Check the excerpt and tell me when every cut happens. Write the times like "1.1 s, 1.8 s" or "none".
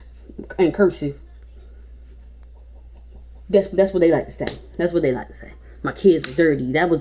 none